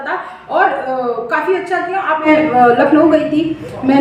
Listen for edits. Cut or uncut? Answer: cut